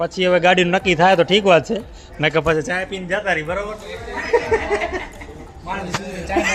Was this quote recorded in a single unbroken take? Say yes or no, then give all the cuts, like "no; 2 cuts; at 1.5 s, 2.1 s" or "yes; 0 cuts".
yes; 0 cuts